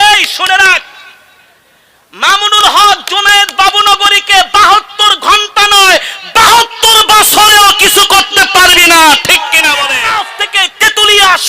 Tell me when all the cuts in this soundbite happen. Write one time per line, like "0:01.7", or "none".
0:10.0